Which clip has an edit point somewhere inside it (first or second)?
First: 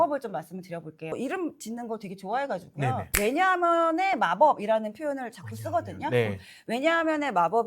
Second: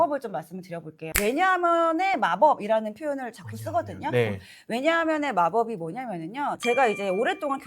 second